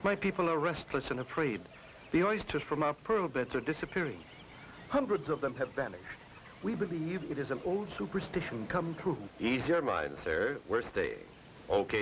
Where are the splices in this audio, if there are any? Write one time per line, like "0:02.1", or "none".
0:08.5